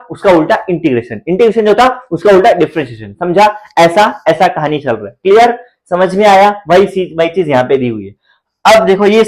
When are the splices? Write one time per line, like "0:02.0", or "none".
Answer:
none